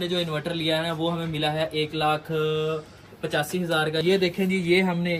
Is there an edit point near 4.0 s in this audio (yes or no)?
yes